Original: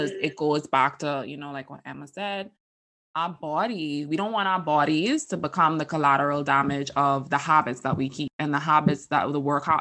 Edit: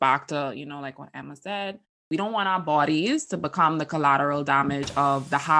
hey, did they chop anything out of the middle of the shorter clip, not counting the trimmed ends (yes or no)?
yes